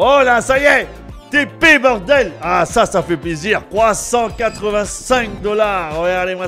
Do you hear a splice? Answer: no; 0 cuts

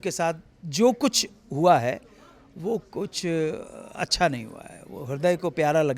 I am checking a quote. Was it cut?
no; 0 cuts

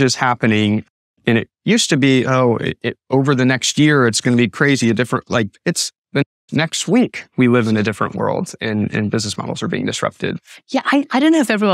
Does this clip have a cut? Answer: no; 0 cuts

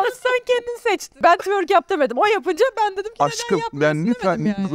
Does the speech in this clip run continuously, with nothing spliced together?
no; 1 cut; at 1.2 s

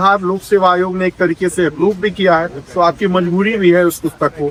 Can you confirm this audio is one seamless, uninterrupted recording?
yes; 0 cuts

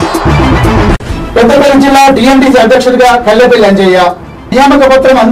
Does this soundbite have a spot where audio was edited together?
yes; 1 cut; at 1.0 s

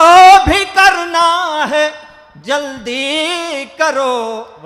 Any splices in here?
no; 0 cuts

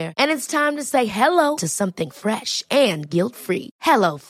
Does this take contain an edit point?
no; 0 cuts

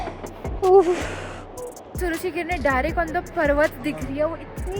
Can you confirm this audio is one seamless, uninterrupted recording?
no; 1 cut; at 1.9 s

